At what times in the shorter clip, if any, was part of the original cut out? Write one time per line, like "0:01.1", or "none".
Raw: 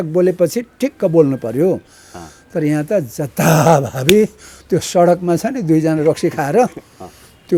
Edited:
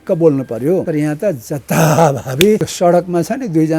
0:00.9
0:02.7